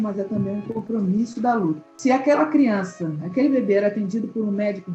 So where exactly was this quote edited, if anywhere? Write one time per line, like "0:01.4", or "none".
0:01.9